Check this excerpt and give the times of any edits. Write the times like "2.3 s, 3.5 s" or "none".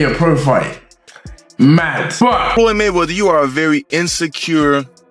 2.6 s